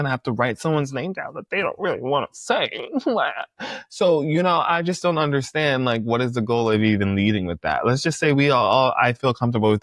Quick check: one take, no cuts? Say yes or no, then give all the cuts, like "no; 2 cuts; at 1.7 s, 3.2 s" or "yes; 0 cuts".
yes; 0 cuts